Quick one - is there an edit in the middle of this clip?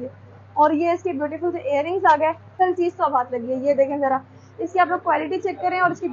yes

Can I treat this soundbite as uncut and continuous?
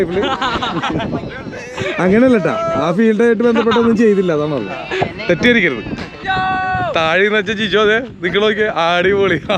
no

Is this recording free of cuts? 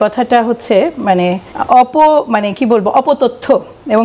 no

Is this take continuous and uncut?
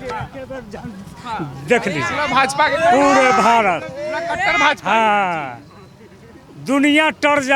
yes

